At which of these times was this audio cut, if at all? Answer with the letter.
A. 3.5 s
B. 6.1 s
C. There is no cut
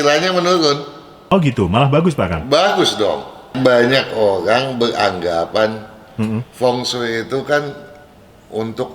A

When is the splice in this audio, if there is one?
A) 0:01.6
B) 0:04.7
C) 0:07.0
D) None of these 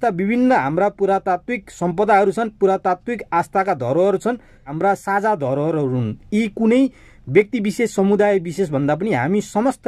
B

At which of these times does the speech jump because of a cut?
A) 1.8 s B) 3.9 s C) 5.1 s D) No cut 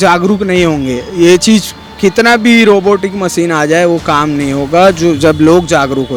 D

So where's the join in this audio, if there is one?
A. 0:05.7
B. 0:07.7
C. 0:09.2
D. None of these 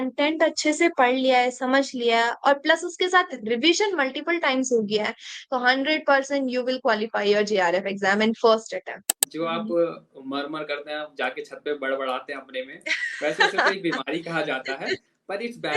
C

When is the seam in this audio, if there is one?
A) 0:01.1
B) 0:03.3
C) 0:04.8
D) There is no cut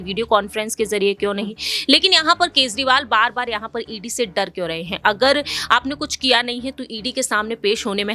D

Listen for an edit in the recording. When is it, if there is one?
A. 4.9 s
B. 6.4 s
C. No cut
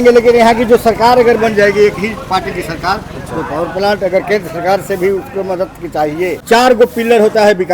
B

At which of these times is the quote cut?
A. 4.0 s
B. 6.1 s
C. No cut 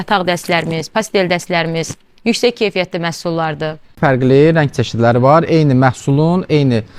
A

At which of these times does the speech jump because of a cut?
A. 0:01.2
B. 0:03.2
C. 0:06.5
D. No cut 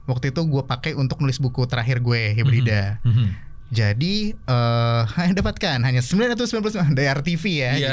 D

